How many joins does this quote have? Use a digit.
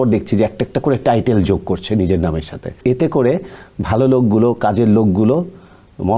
1